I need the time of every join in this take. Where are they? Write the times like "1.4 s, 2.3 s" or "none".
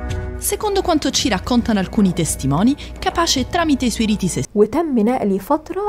4.4 s